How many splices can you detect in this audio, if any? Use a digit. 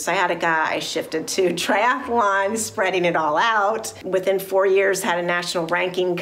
1